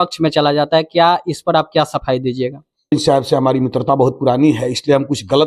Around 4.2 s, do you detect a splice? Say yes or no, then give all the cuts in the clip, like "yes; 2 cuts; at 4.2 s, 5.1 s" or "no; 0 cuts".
no; 1 cut; at 2.9 s